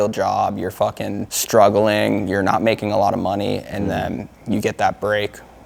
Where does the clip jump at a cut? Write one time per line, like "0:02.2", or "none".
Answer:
0:01.3